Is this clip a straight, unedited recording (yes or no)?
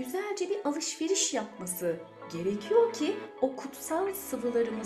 yes